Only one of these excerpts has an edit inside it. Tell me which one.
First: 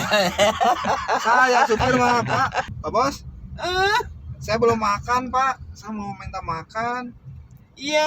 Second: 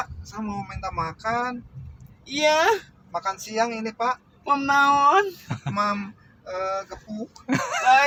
first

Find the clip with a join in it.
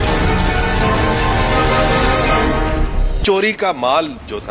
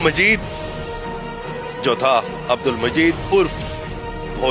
first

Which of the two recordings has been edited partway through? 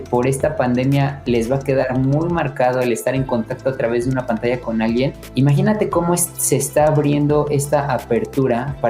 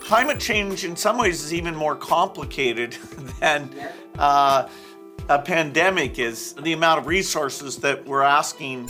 first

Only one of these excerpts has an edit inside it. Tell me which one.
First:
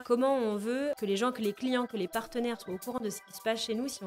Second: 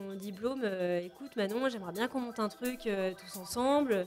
first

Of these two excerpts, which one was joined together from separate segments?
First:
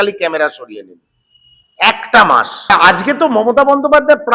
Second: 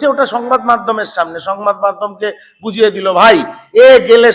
first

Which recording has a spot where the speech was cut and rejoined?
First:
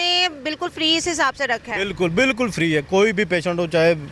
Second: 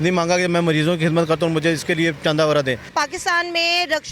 second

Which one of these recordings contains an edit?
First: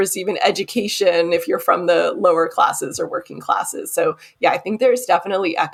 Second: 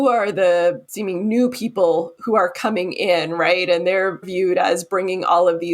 second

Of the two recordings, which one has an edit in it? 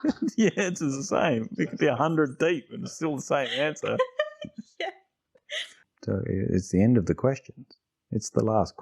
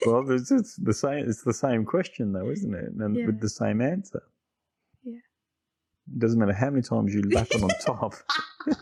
first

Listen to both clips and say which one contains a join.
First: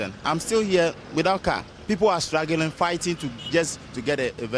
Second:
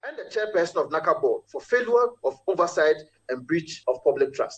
second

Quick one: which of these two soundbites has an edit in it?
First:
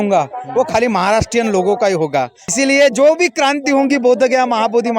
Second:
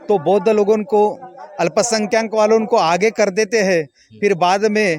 first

